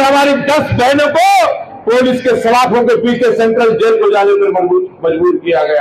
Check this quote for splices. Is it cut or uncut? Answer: uncut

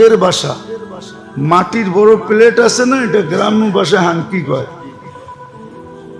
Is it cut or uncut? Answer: cut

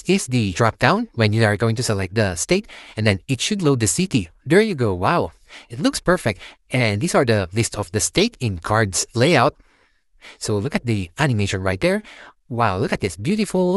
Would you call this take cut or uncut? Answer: uncut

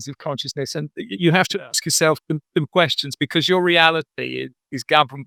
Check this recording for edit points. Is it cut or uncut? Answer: uncut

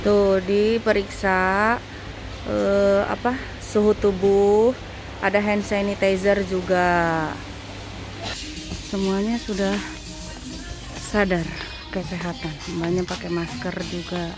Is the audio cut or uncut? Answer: uncut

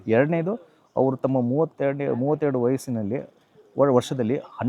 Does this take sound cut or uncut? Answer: uncut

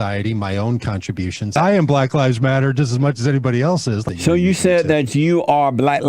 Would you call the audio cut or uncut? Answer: cut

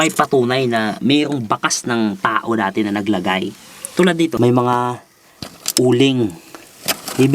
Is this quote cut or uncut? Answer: cut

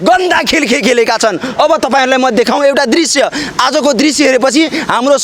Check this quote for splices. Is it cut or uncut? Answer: uncut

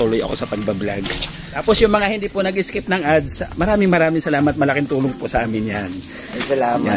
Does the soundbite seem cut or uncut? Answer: cut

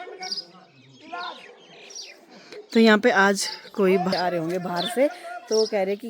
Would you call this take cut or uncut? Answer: cut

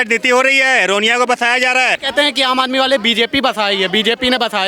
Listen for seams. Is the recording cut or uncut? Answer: cut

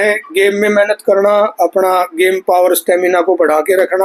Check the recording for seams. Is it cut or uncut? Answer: uncut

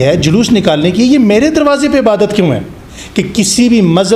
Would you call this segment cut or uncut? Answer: cut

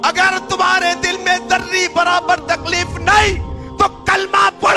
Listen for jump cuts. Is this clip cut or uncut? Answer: uncut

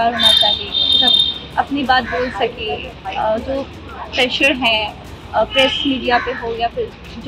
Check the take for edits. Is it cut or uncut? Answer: uncut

